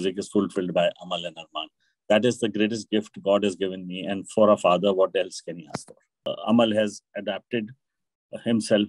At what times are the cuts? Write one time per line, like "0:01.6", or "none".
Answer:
0:06.3